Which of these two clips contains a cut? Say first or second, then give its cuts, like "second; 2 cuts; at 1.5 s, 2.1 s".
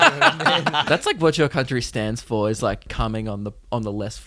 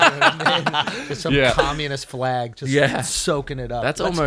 first; 2 cuts; at 0.8 s, 2.9 s